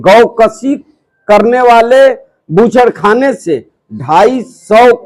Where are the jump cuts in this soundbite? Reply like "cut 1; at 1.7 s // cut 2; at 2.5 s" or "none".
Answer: none